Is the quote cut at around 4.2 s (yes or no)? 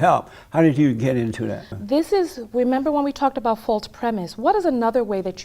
no